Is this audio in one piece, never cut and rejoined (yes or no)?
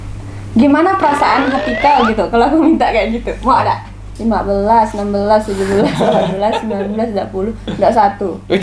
no